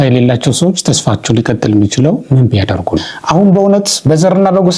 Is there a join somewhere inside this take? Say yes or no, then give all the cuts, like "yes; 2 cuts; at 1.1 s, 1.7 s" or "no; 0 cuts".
yes; 1 cut; at 3.1 s